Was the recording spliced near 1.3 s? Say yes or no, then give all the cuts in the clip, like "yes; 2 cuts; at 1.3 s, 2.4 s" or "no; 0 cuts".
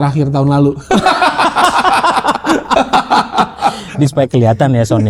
no; 1 cut; at 3.9 s